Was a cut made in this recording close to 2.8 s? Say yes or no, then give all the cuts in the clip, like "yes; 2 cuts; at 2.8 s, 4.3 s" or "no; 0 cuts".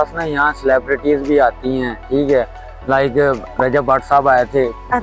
no; 0 cuts